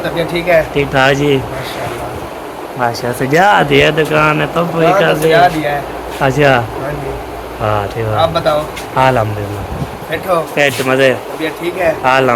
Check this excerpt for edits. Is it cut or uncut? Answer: uncut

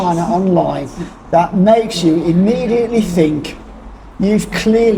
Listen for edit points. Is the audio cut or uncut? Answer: uncut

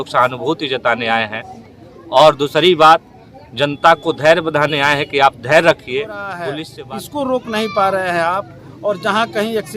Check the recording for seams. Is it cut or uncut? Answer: cut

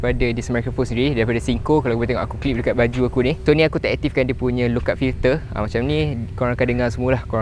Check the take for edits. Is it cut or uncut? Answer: uncut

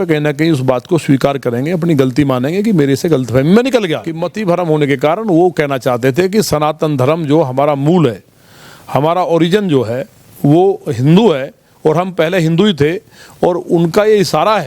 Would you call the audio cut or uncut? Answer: cut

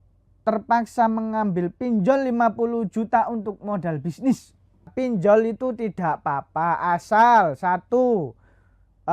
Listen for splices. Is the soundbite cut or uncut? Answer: cut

